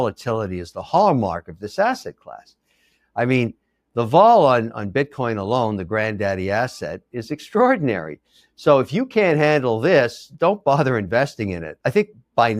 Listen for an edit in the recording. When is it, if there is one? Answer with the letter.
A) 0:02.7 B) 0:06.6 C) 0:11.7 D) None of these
C